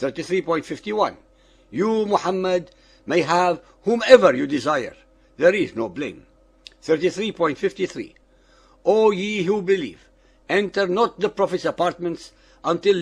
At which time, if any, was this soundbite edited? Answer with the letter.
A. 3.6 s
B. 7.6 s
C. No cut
C